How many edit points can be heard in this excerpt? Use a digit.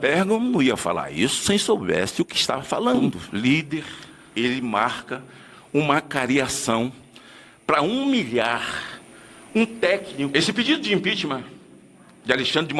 2